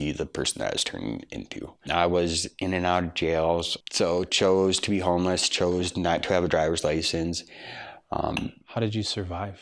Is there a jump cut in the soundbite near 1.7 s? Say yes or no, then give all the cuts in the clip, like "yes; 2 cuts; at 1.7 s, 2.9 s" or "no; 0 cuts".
yes; 2 cuts; at 1.7 s, 3.8 s